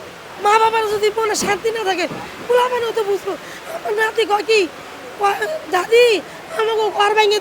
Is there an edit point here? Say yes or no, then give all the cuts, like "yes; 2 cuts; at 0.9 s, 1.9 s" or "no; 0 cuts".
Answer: no; 0 cuts